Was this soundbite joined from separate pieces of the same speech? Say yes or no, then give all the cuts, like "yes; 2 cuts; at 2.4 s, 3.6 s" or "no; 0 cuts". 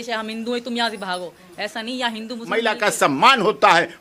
yes; 1 cut; at 2.6 s